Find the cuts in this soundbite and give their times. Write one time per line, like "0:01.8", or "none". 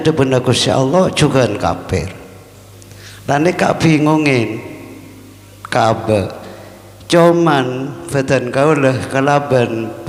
none